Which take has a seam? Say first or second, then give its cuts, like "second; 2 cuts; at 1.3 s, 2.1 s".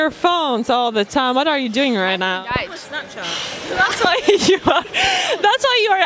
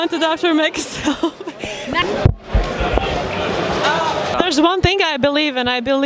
second; 2 cuts; at 2.0 s, 4.4 s